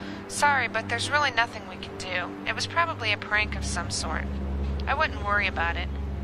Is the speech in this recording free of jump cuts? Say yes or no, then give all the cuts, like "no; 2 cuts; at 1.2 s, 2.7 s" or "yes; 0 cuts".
yes; 0 cuts